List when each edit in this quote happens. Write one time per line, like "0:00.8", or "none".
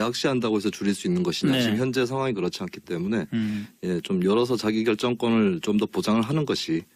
0:05.9